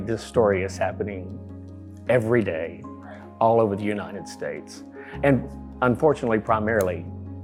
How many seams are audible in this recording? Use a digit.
0